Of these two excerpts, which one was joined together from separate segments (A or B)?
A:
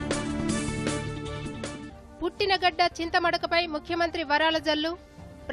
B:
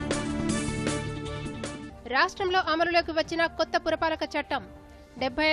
B